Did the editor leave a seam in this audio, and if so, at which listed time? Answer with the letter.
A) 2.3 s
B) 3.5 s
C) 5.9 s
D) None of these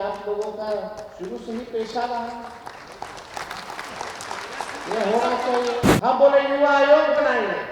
C